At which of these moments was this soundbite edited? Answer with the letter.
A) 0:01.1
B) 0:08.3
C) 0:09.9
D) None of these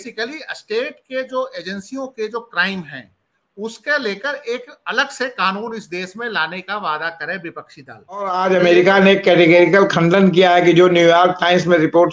B